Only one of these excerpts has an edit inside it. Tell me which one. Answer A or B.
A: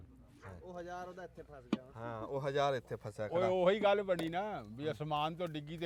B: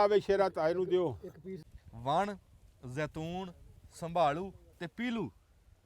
B